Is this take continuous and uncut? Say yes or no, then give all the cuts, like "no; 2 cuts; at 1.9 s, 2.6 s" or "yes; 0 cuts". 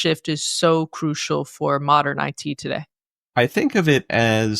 no; 1 cut; at 3.3 s